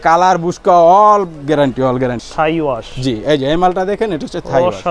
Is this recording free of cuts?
no; 1 cut; at 2.2 s

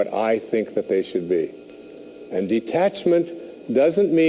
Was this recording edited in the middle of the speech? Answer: no; 0 cuts

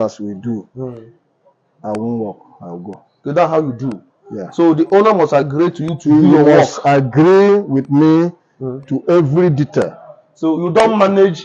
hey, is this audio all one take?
yes; 0 cuts

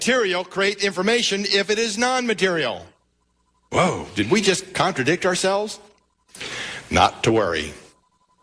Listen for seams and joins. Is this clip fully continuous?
no; 1 cut; at 4.9 s

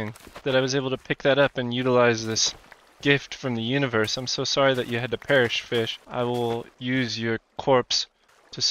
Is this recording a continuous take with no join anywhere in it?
no; 2 cuts; at 6.0 s, 6.7 s

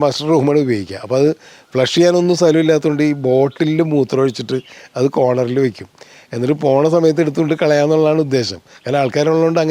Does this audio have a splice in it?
no; 0 cuts

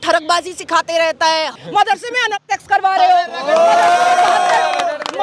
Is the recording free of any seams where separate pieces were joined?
no; 1 cut; at 1.6 s

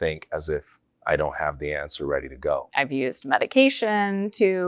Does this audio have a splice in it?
yes; 1 cut; at 2.7 s

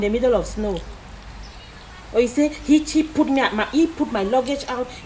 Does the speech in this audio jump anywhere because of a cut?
no; 0 cuts

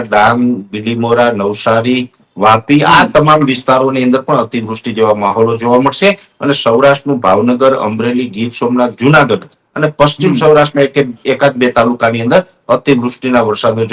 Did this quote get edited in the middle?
no; 0 cuts

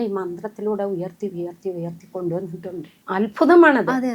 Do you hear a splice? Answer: yes; 1 cut; at 2.9 s

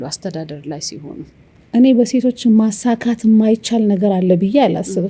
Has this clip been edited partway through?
yes; 1 cut; at 1.6 s

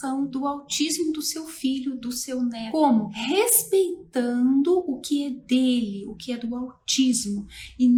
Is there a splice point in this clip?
no; 0 cuts

